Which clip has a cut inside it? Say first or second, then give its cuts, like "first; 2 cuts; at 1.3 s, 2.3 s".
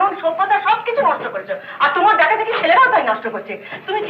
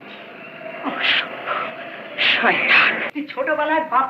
second; 1 cut; at 3.0 s